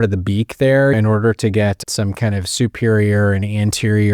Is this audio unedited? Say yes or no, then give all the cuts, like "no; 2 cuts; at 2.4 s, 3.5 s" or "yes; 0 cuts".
no; 2 cuts; at 0.9 s, 1.8 s